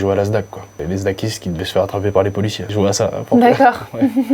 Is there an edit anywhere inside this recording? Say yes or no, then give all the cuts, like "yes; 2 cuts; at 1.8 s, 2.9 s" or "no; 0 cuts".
yes; 2 cuts; at 0.8 s, 2.7 s